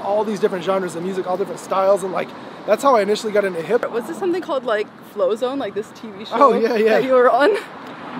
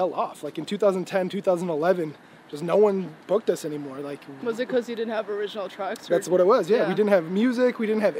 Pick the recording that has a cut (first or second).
first